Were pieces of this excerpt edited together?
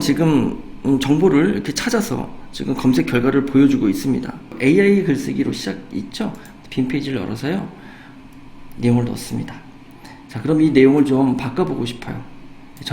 yes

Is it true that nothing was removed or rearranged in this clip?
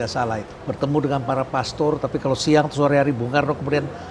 yes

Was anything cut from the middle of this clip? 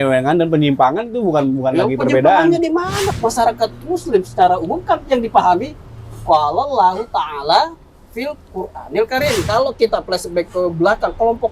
yes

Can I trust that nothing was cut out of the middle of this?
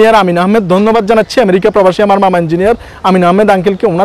yes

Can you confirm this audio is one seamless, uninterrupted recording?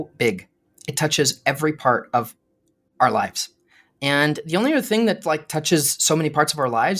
yes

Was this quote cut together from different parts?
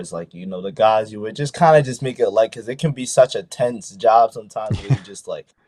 no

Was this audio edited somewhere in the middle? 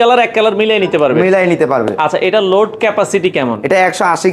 no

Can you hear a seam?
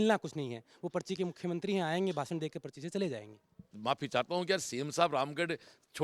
yes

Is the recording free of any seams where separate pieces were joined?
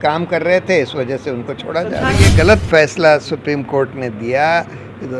no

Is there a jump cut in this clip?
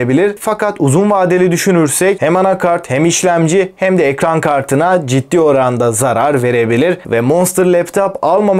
yes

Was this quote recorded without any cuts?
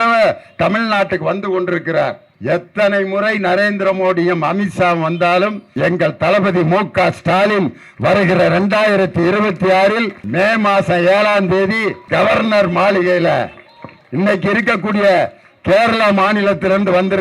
no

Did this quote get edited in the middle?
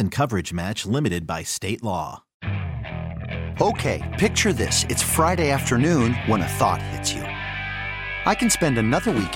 yes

